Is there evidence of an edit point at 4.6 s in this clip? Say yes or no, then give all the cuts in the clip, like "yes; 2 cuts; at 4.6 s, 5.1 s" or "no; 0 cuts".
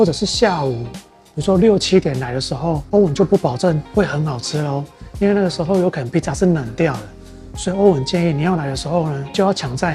no; 0 cuts